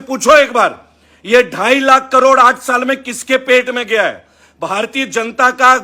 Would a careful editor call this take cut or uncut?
uncut